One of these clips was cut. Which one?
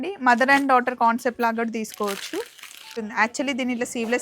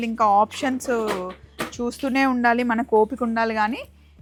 first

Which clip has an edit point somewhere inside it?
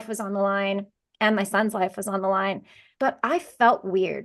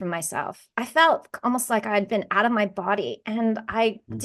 first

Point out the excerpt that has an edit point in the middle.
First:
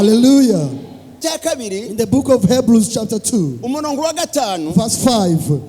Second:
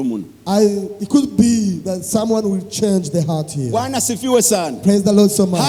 first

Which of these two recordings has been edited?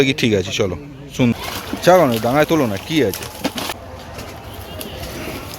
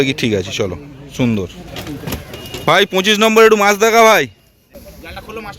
first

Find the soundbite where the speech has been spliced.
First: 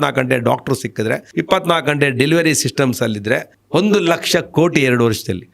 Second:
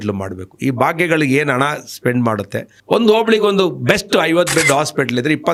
first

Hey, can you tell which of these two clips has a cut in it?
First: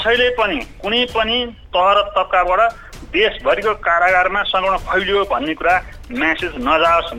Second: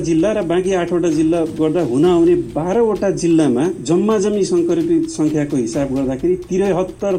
first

